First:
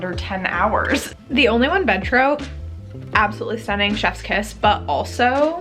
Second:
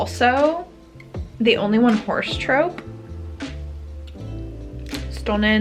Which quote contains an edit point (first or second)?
first